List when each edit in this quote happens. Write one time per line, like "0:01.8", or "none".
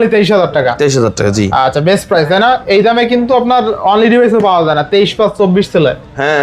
none